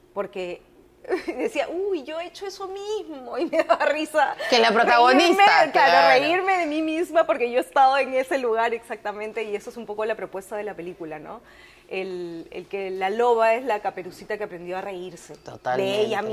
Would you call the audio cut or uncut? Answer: uncut